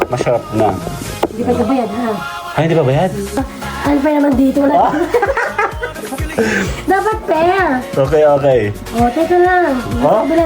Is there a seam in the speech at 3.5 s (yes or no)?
yes